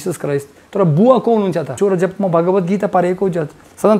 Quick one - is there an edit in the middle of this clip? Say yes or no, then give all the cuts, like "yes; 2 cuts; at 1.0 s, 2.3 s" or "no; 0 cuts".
yes; 1 cut; at 1.7 s